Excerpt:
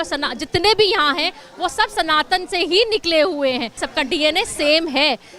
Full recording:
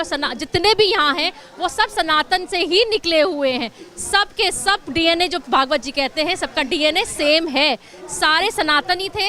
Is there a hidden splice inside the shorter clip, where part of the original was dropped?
yes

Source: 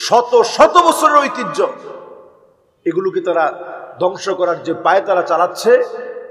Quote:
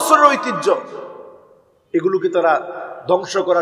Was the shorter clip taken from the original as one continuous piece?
yes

